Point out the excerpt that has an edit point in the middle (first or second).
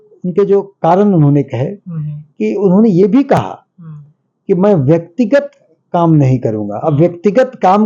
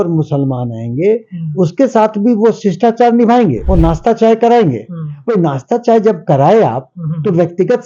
second